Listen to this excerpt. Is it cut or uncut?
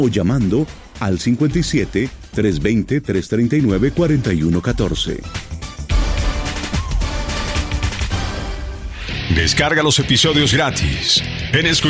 cut